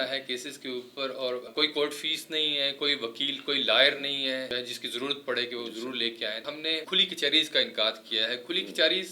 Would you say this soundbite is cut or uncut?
cut